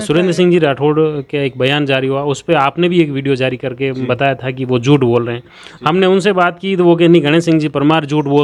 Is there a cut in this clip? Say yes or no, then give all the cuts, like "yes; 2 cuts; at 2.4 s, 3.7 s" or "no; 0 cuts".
no; 0 cuts